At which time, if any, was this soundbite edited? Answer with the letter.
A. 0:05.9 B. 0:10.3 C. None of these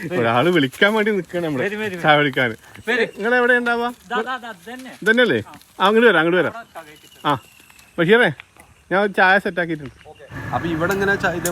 B